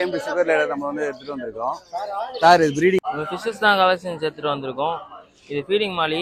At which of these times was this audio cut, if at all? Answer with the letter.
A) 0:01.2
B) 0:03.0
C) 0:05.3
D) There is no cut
B